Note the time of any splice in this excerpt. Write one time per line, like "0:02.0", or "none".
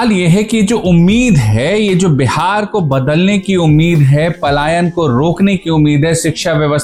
none